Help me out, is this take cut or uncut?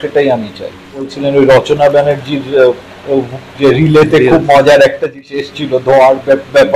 cut